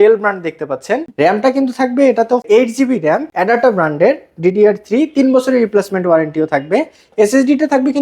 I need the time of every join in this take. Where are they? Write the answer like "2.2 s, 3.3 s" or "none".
1.1 s, 2.4 s, 3.3 s